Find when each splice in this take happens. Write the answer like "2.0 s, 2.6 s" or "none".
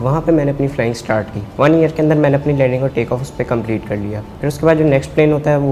1.4 s, 4.2 s